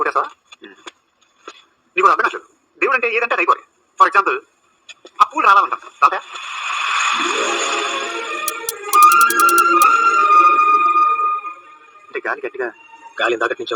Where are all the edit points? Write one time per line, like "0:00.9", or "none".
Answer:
0:08.4